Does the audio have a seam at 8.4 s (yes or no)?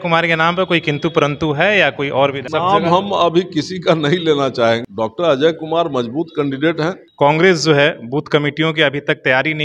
no